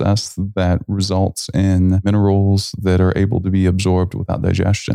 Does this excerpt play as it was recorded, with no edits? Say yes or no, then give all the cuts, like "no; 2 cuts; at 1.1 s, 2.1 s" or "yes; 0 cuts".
no; 1 cut; at 2.1 s